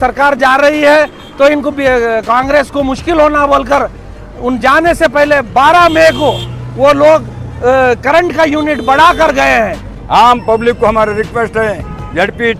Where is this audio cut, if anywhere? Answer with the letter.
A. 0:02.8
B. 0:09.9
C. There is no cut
B